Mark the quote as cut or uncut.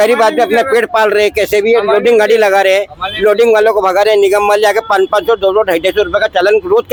uncut